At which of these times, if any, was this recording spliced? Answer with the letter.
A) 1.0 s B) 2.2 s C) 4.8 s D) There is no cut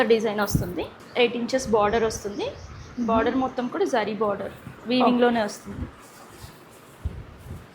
A